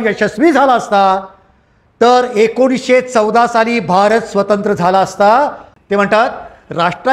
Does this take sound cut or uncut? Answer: cut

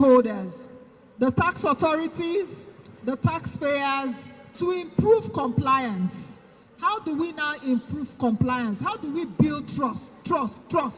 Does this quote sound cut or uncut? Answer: cut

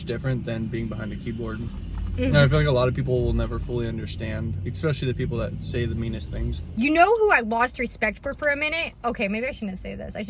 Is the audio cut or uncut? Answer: cut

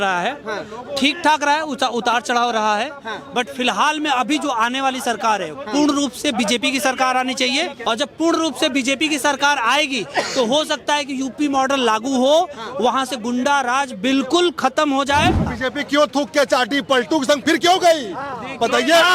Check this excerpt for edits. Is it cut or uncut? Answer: cut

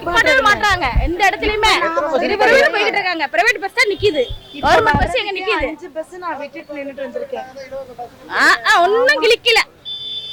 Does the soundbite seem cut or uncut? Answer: uncut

